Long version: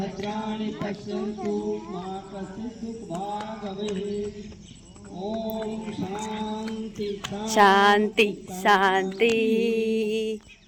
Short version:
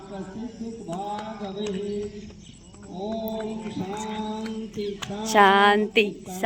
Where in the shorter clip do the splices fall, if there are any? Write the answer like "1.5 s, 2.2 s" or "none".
none